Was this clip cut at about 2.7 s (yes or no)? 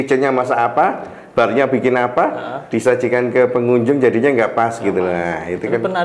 no